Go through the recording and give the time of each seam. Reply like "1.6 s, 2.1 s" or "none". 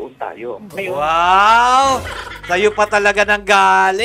none